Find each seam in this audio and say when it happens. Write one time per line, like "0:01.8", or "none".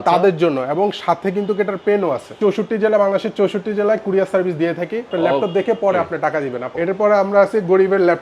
0:02.4
0:05.1
0:06.7